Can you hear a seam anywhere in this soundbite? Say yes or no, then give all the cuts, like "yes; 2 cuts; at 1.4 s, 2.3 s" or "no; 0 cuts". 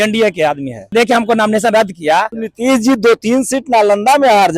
yes; 2 cuts; at 0.9 s, 2.4 s